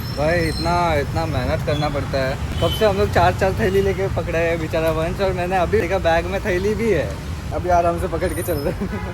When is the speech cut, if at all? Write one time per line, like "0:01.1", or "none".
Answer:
0:02.5
0:05.9
0:07.5